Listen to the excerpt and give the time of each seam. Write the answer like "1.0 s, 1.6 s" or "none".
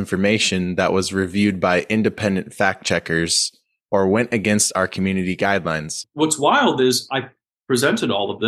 6.0 s